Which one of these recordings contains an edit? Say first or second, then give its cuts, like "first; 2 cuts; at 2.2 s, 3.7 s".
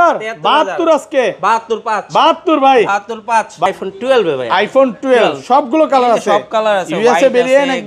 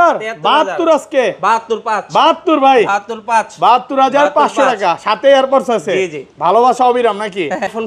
first; 1 cut; at 3.7 s